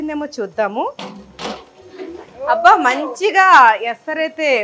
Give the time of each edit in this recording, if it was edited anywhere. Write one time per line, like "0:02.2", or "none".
none